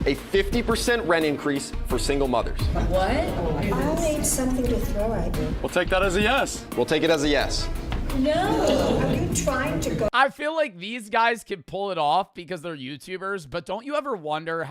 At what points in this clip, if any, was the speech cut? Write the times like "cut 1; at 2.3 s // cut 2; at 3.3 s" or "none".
cut 1; at 5.6 s